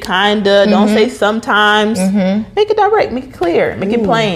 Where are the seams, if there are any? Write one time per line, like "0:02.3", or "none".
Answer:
none